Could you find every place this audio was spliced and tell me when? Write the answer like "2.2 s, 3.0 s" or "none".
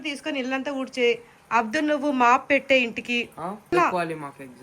3.7 s